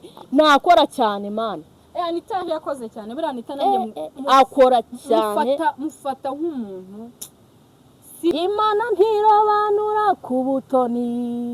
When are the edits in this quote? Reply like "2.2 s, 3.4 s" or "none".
8.3 s

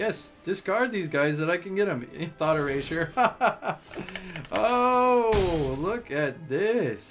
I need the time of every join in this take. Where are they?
none

